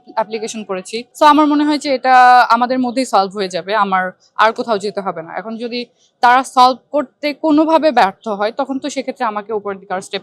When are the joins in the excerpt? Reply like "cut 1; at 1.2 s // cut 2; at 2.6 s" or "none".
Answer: cut 1; at 1.0 s

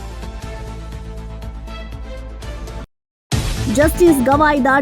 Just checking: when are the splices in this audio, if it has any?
cut 1; at 2.8 s

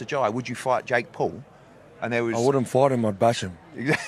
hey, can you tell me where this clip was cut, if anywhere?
none

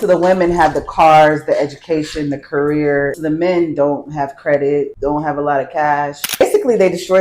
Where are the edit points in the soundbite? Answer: cut 1; at 3.2 s // cut 2; at 4.9 s // cut 3; at 6.4 s

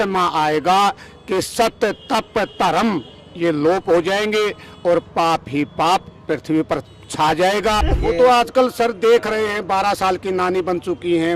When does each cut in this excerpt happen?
cut 1; at 7.9 s

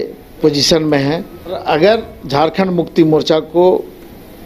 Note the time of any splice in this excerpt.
cut 1; at 1.6 s

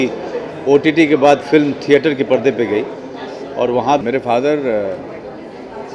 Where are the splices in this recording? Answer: cut 1; at 3.8 s

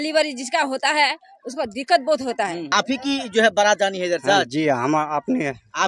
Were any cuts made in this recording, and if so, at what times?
cut 1; at 2.6 s

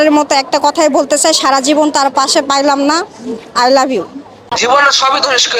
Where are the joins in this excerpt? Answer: cut 1; at 4.3 s

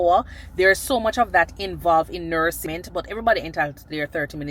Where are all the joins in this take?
cut 1; at 2.6 s

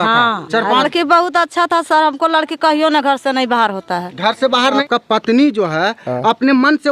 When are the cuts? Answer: cut 1; at 0.9 s // cut 2; at 4.8 s

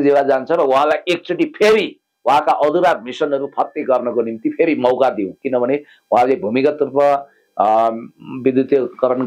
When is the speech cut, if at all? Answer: none

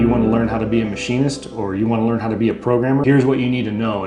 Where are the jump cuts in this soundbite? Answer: cut 1; at 3.0 s

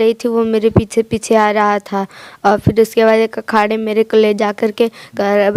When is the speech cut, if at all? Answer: none

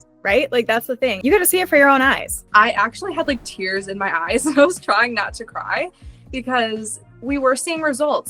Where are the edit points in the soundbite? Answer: cut 1; at 1.2 s // cut 2; at 2.3 s

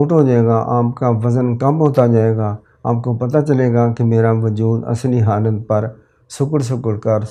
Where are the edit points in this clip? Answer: none

